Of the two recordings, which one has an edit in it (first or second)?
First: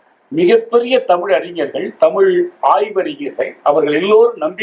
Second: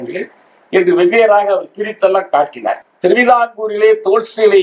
second